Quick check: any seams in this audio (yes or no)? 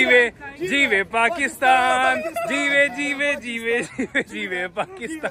no